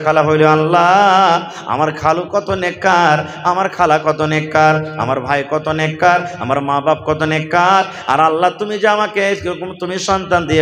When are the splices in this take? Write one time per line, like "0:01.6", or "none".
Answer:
none